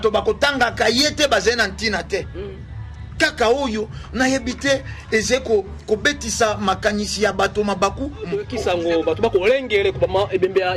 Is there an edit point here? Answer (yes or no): yes